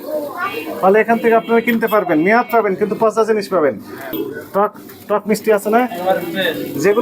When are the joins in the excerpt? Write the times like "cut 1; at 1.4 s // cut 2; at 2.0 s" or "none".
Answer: cut 1; at 4.1 s